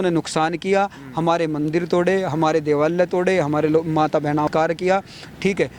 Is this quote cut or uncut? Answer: cut